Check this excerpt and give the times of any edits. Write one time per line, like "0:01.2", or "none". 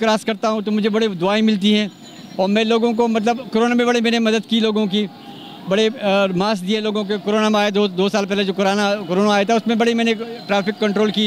none